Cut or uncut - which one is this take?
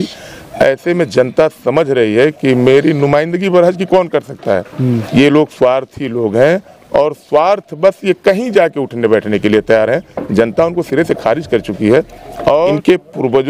cut